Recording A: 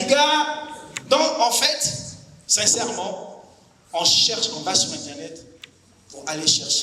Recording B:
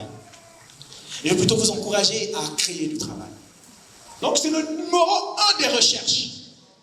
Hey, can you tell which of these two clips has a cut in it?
B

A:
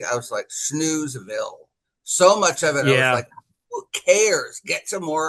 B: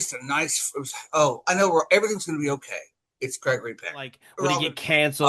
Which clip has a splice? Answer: B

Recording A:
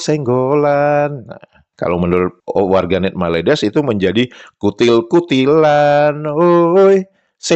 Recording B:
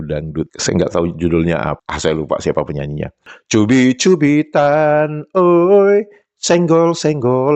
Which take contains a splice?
B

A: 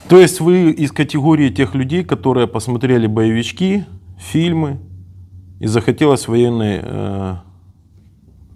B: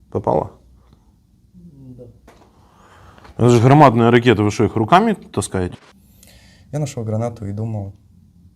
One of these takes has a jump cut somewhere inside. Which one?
B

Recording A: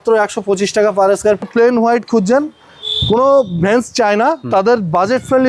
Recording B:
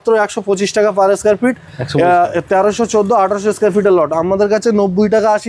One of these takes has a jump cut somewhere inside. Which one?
A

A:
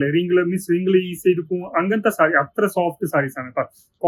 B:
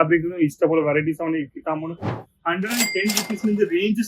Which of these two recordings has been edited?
B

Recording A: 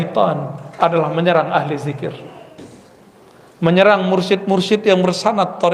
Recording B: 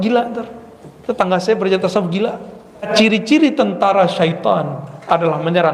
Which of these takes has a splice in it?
B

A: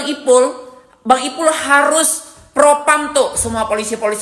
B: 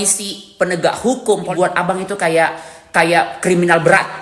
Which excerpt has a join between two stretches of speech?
B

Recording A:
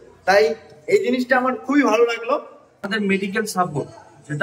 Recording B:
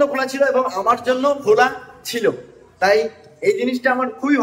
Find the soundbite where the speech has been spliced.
A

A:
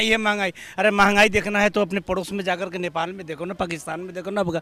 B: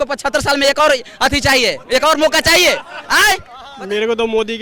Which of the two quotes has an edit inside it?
B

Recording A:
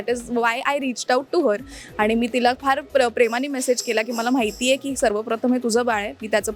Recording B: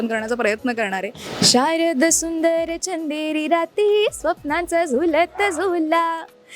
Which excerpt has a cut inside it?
B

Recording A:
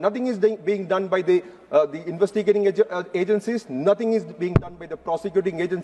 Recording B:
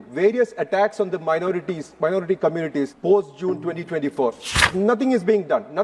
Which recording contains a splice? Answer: B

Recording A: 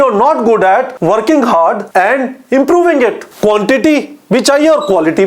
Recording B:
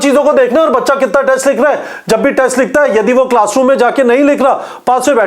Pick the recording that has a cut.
A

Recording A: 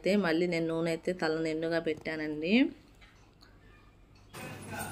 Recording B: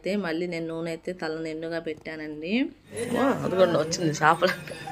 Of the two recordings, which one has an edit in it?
B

